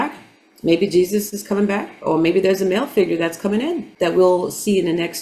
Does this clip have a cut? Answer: yes; 1 cut; at 3.9 s

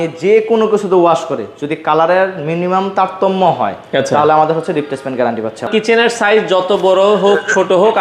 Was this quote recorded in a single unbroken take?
no; 1 cut; at 5.7 s

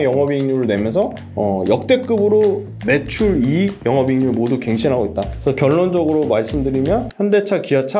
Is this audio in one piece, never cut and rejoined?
no; 5 cuts; at 1.2 s, 2.7 s, 3.8 s, 5.3 s, 7.1 s

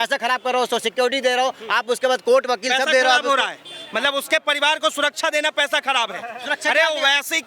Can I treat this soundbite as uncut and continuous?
yes; 0 cuts

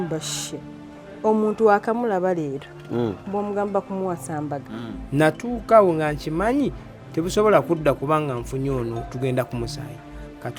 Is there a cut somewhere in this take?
yes; 1 cut; at 4.7 s

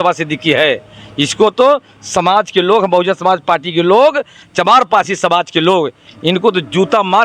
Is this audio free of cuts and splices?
yes; 0 cuts

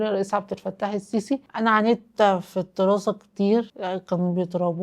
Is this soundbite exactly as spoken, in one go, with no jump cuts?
no; 1 cut; at 1.5 s

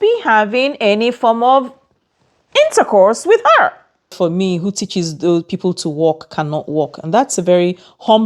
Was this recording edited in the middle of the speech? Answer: yes; 1 cut; at 4.1 s

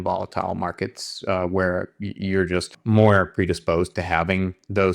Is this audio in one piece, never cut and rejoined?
no; 1 cut; at 2.7 s

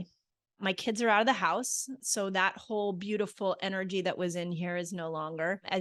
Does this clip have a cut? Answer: no; 0 cuts

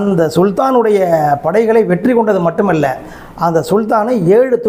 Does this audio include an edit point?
no; 0 cuts

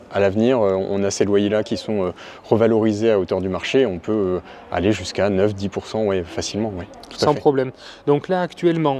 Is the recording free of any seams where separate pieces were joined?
yes; 0 cuts

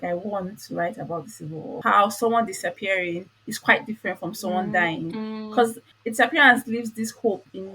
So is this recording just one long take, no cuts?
no; 2 cuts; at 1.8 s, 5.9 s

